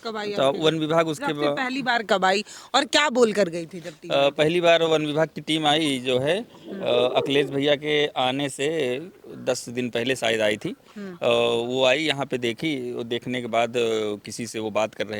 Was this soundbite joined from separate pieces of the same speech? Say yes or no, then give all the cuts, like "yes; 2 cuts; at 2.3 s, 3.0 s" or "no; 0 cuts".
no; 0 cuts